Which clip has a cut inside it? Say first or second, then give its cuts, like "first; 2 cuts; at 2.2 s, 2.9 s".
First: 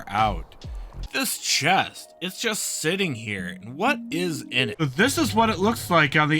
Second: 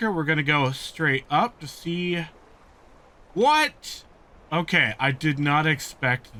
first; 2 cuts; at 1.1 s, 4.7 s